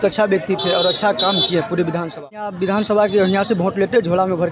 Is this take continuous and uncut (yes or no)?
no